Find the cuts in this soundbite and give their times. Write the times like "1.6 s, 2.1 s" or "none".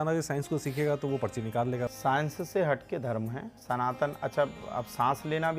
1.9 s, 3.5 s